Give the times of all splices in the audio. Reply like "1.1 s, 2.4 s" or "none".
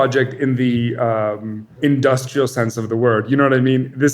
1.7 s